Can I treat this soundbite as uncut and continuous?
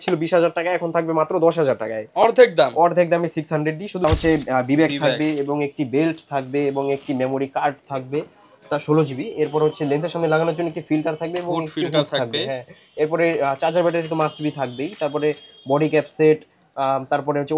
no; 1 cut; at 4.0 s

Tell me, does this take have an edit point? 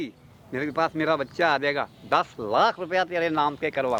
no; 0 cuts

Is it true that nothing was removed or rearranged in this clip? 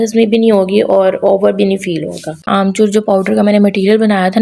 no; 1 cut; at 2.5 s

